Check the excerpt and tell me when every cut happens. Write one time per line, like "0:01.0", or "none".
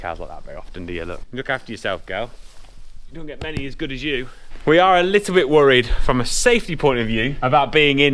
0:01.2
0:04.4